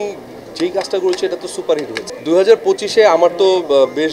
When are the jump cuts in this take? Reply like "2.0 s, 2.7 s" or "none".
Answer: 2.0 s